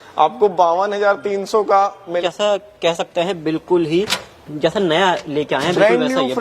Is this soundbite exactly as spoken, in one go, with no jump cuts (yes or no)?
no